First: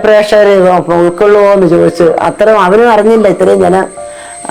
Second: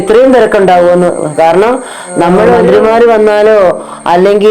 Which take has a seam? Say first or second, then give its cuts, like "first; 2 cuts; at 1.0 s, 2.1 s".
second; 1 cut; at 2.6 s